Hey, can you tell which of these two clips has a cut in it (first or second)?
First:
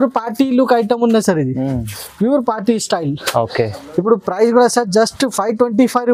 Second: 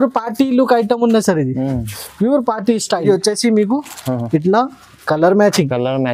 second